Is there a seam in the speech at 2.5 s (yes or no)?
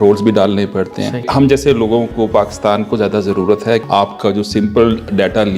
no